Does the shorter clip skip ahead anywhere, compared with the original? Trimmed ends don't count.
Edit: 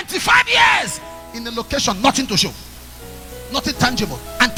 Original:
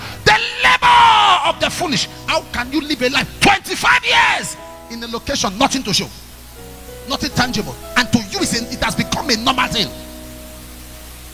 no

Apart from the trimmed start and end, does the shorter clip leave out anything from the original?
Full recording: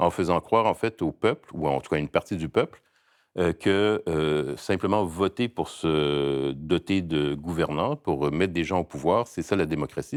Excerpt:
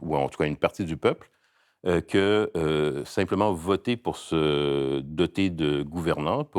no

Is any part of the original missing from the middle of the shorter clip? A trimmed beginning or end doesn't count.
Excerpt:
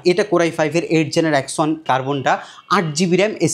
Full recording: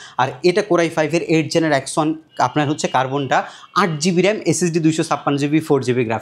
yes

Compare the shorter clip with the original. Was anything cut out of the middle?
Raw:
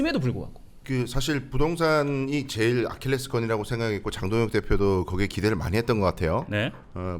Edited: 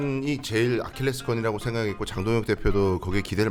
no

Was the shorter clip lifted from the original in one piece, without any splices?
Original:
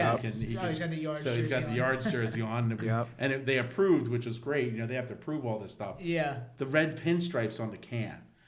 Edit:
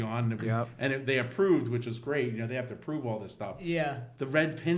yes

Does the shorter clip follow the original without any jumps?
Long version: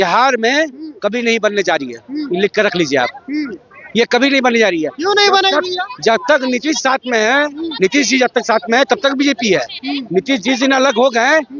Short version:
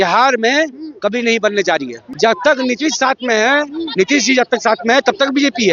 no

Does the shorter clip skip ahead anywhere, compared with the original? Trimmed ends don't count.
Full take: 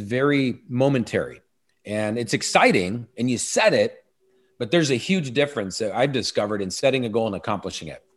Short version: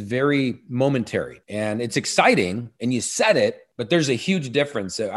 yes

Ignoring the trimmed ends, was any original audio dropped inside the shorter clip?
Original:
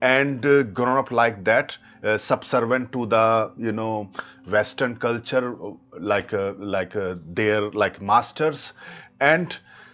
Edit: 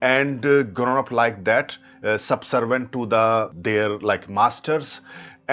yes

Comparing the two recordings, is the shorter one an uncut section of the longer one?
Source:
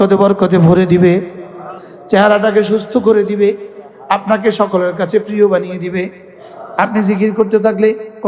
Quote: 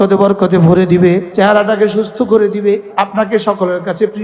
no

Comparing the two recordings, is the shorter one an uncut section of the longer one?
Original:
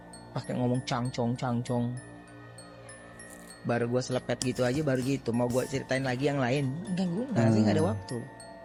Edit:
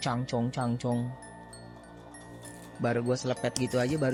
yes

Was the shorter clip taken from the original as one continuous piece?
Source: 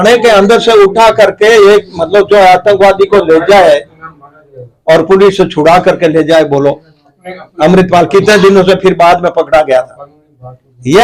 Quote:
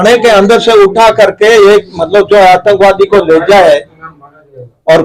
yes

